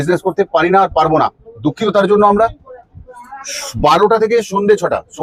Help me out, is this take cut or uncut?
uncut